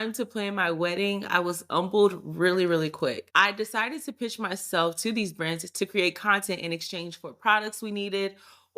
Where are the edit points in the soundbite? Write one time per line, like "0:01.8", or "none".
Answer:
0:03.2

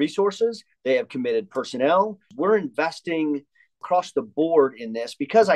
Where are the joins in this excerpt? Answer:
0:02.3
0:03.8

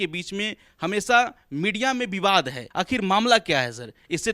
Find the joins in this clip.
0:02.6

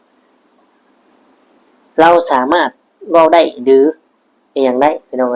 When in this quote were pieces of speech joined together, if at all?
none

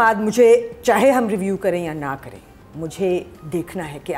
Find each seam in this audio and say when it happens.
none

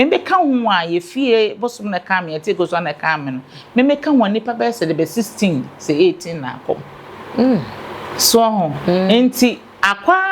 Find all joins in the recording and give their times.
none

